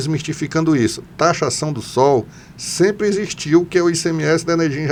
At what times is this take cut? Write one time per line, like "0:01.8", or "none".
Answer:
none